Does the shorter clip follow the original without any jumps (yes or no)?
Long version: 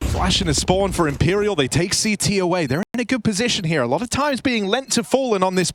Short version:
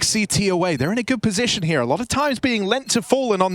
no